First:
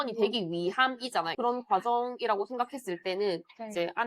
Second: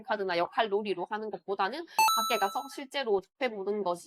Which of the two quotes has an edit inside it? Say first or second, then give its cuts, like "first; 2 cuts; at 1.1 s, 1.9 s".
first; 1 cut; at 1.3 s